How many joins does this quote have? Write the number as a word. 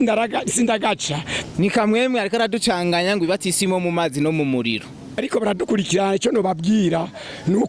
two